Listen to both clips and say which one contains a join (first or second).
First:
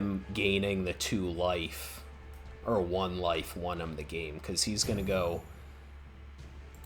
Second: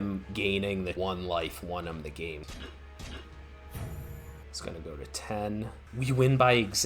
second